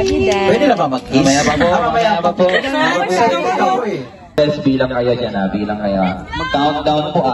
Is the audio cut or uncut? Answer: cut